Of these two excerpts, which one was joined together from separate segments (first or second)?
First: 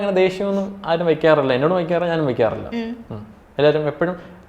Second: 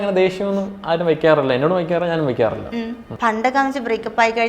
second